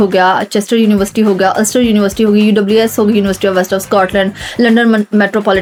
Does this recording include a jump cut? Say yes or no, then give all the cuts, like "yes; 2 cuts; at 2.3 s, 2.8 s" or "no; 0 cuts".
no; 0 cuts